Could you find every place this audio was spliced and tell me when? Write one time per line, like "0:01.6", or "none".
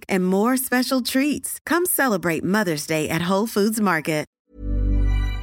0:04.3